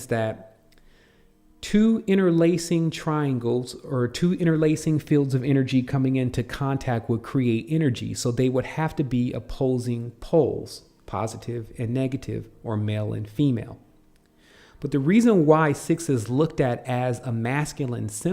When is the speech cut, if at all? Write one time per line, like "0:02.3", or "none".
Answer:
0:04.7